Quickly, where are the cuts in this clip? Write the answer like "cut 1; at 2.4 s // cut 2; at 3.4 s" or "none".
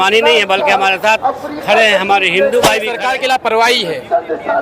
cut 1; at 2.9 s